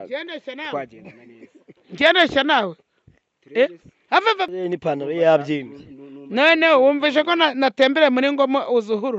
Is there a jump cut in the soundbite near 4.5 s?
yes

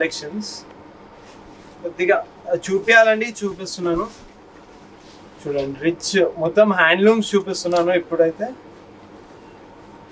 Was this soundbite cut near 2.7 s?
no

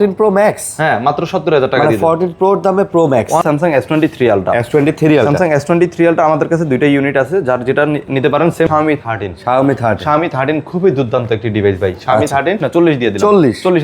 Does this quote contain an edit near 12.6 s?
yes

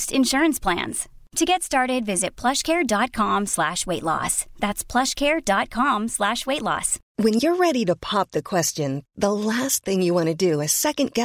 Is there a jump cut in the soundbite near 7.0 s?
yes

